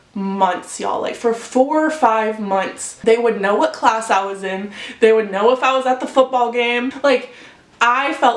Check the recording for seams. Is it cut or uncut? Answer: cut